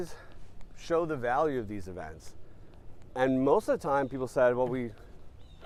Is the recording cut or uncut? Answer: uncut